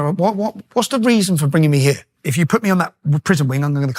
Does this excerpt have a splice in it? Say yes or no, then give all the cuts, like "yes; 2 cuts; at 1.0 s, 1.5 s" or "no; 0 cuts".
yes; 1 cut; at 2.2 s